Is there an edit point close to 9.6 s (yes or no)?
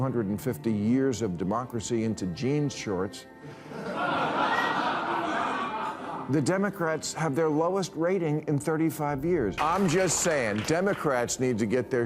yes